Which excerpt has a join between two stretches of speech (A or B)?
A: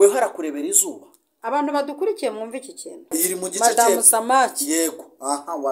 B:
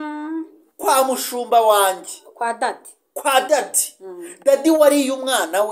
A